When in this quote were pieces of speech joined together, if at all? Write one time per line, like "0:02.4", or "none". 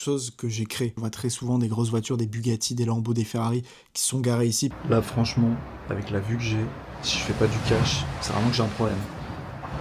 0:01.0
0:04.8